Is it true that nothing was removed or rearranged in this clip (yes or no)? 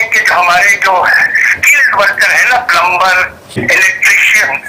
no